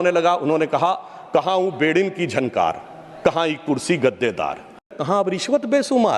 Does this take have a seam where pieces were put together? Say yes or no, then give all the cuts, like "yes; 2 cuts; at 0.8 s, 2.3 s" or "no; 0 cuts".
yes; 1 cut; at 4.9 s